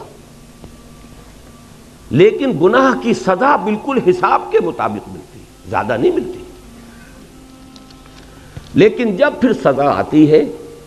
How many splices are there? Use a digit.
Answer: 1